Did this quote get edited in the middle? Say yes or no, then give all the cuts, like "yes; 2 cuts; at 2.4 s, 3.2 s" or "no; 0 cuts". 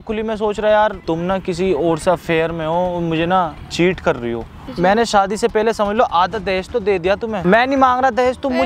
yes; 3 cuts; at 1.0 s, 4.6 s, 7.4 s